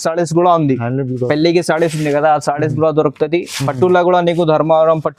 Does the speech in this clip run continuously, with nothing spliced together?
yes; 0 cuts

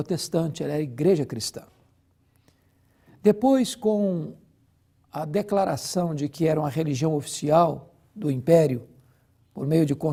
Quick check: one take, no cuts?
yes; 0 cuts

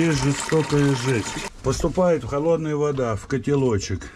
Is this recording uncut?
no; 1 cut; at 1.4 s

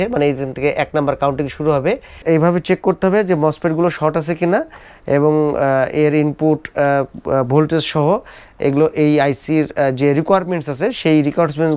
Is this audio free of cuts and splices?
no; 1 cut; at 2.1 s

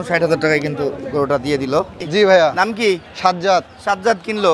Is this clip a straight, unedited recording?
no; 1 cut; at 2.0 s

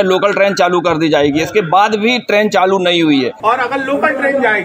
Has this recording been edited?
yes; 1 cut; at 3.3 s

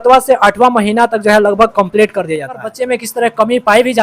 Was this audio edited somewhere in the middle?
yes; 1 cut; at 2.7 s

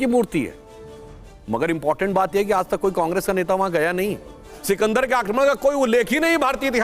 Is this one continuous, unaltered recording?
no; 1 cut; at 4.6 s

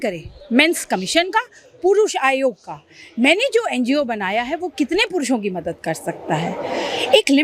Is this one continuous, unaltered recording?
yes; 0 cuts

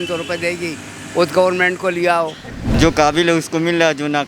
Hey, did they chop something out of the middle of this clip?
yes; 1 cut; at 2.6 s

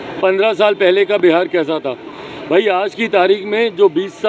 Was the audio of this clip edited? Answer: no; 0 cuts

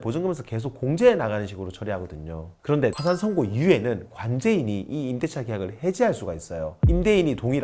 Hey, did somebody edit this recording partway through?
yes; 1 cut; at 2.7 s

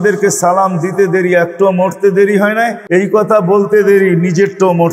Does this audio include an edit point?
yes; 1 cut; at 2.8 s

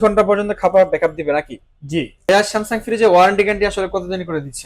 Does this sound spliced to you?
yes; 1 cut; at 2.1 s

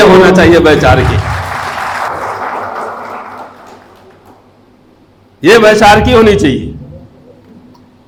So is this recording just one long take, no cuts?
yes; 0 cuts

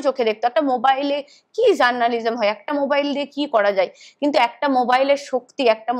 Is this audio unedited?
yes; 0 cuts

